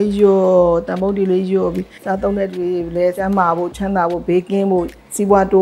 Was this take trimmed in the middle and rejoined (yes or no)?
yes